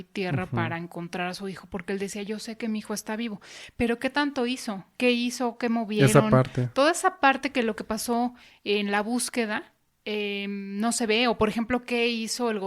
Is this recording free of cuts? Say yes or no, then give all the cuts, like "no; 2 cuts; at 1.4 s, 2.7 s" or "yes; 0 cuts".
yes; 0 cuts